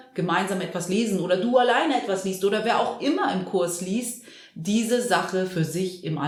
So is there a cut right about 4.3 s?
no; 0 cuts

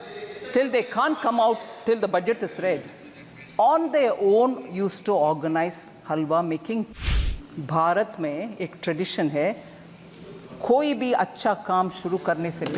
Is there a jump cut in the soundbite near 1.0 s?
no; 1 cut; at 7.0 s

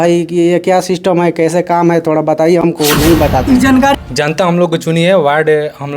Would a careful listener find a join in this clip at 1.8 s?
no; 1 cut; at 3.9 s

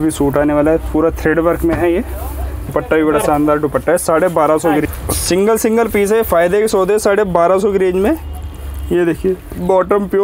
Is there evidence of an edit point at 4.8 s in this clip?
yes; 2 cuts; at 2.7 s, 4.8 s

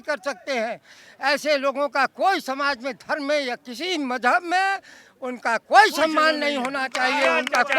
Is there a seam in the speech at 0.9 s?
no; 0 cuts

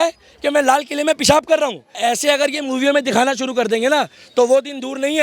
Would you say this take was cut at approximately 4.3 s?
no; 1 cut; at 1.9 s

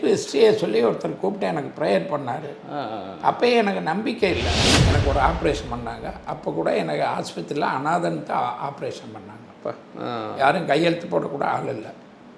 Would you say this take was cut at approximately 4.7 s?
yes; 1 cut; at 4.7 s

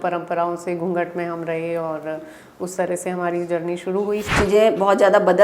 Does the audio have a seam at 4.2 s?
yes; 1 cut; at 4.2 s

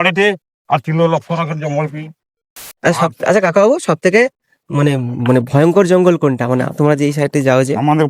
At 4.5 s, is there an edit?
no; 1 cut; at 2.5 s

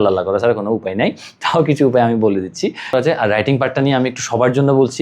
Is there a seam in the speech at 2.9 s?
yes; 1 cut; at 2.9 s

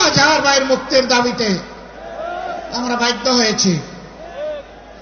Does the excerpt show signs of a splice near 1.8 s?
no; 0 cuts

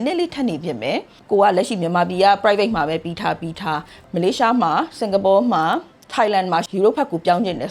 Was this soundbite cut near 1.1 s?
yes; 3 cuts; at 1.1 s, 4.0 s, 6.3 s

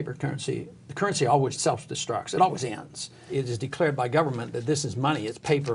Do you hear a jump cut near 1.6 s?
yes; 2 cuts; at 1.6 s, 3.3 s

